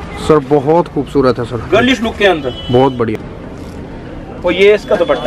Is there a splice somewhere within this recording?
yes; 1 cut; at 3.3 s

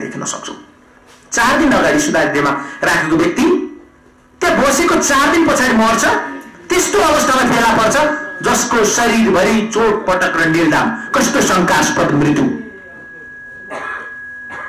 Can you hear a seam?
no; 0 cuts

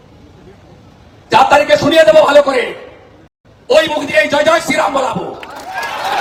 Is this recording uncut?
yes; 0 cuts

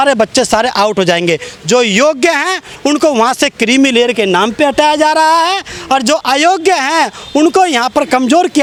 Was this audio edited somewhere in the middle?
no; 0 cuts

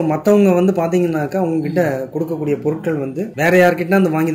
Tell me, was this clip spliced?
no; 0 cuts

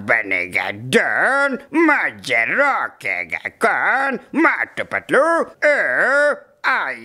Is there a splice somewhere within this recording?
yes; 2 cuts; at 1.6 s, 5.5 s

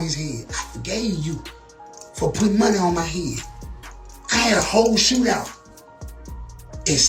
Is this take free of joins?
yes; 0 cuts

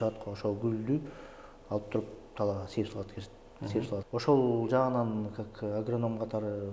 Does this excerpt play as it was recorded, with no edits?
no; 1 cut; at 4.1 s

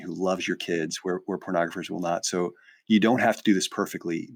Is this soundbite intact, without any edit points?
yes; 0 cuts

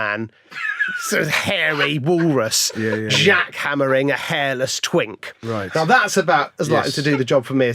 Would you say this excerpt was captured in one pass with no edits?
yes; 0 cuts

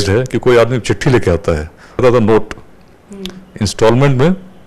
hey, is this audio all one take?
no; 1 cut; at 2.0 s

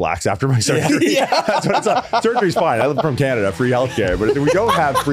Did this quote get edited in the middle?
no; 0 cuts

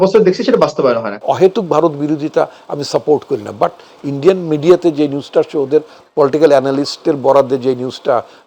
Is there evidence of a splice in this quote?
yes; 1 cut; at 1.1 s

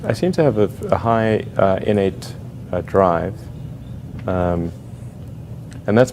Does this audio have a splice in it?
yes; 1 cut; at 4.5 s

